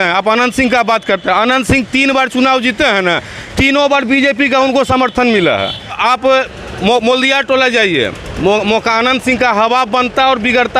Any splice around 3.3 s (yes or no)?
no